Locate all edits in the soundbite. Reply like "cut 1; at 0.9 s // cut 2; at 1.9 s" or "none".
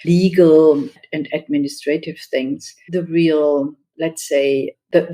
cut 1; at 2.7 s // cut 2; at 3.8 s